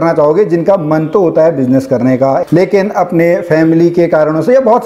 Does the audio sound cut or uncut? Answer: cut